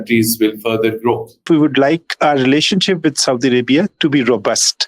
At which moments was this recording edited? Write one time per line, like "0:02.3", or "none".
0:01.4